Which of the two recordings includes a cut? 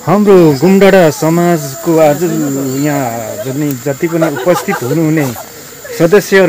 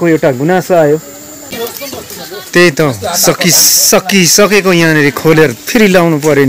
second; 1 cut; at 1.5 s

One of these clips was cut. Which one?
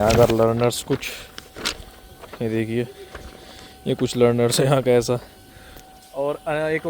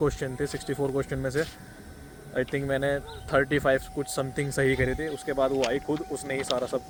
first; 1 cut; at 5.6 s

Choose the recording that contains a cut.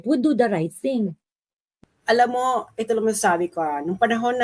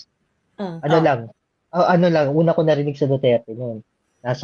first; 1 cut; at 1.6 s

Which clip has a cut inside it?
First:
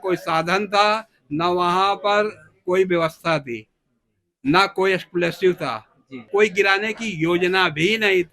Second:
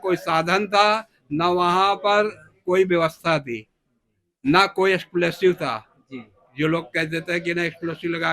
first; 1 cut; at 6.3 s

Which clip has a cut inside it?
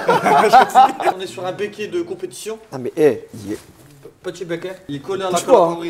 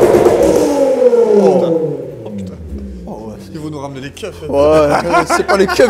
first; 2 cuts; at 1.1 s, 4.9 s

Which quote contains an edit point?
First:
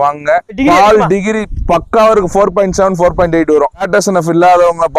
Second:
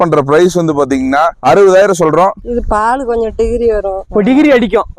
second; 3 cuts; at 1.4 s, 2.5 s, 4.0 s

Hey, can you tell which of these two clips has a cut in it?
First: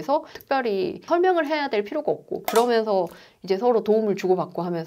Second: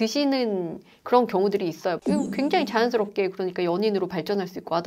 first; 1 cut; at 2.4 s

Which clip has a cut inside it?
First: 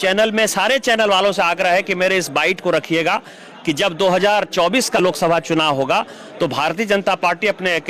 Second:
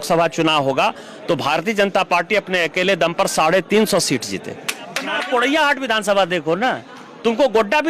second; 1 cut; at 5.1 s

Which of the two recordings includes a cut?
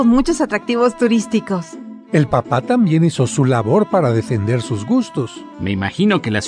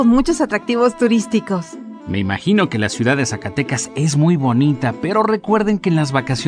second; 1 cut; at 1.9 s

